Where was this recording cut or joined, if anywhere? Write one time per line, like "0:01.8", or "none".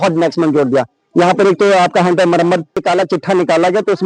0:02.8